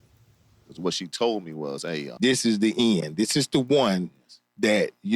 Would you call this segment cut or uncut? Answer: cut